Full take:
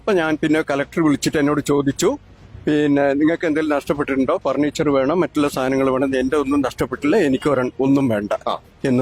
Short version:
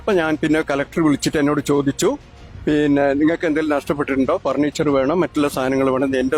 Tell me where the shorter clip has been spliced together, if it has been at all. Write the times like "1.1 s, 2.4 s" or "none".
none